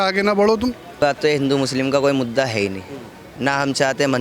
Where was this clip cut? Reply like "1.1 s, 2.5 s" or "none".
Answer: 1.0 s